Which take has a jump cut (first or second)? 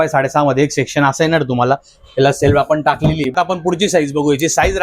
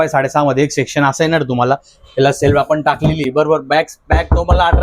first